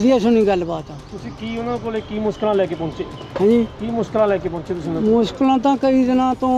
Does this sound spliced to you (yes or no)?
no